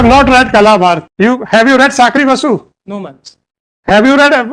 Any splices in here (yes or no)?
yes